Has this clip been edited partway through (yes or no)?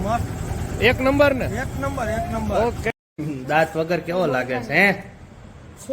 yes